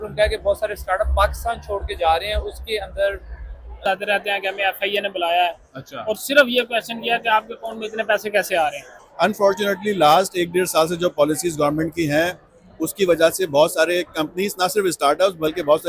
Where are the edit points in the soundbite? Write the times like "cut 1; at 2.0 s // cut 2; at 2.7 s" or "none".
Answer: cut 1; at 3.8 s // cut 2; at 8.9 s

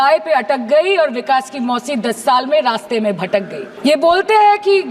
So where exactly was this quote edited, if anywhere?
cut 1; at 3.6 s

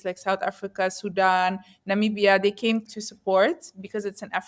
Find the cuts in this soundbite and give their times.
none

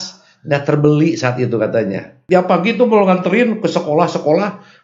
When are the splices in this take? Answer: cut 1; at 2.1 s

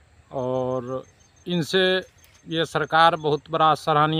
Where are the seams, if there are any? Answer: none

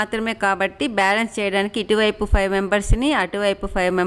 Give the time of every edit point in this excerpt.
none

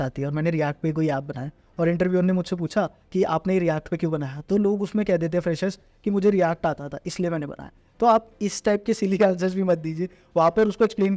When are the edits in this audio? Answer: cut 1; at 3.0 s

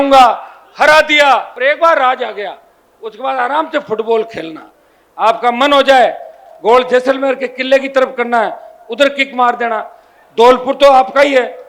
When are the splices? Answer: cut 1; at 1.5 s

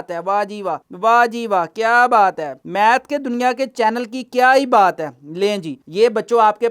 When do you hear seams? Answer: none

